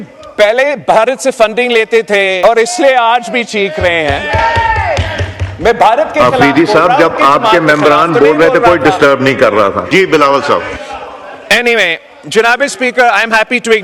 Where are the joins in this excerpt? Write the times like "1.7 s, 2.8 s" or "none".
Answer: 2.4 s, 9.8 s